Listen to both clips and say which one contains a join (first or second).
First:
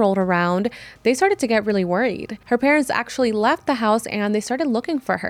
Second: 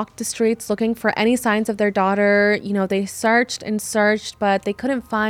first